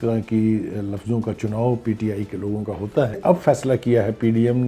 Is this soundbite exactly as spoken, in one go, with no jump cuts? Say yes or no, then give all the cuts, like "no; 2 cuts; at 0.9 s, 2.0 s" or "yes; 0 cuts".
no; 1 cut; at 3.2 s